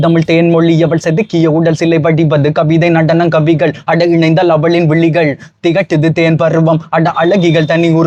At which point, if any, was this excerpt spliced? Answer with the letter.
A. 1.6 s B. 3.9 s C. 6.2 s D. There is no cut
D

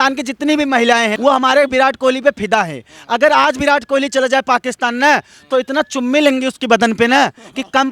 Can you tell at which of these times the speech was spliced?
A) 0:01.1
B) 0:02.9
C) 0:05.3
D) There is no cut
A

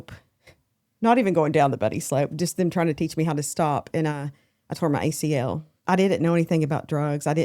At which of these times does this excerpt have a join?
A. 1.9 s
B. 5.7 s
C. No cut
B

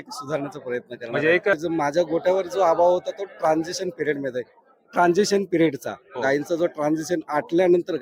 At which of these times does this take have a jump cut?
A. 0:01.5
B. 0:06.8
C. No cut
A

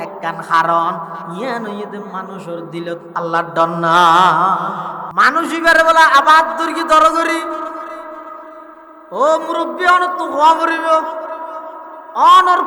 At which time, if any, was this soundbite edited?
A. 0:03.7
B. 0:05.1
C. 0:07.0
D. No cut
B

